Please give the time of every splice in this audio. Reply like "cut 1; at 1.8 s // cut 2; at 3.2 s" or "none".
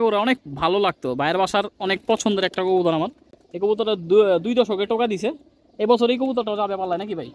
none